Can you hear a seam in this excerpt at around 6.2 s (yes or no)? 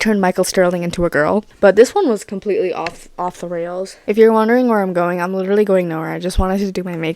no